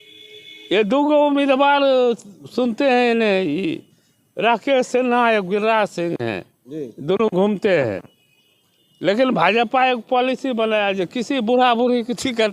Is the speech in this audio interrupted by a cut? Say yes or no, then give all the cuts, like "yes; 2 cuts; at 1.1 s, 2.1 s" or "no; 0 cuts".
no; 0 cuts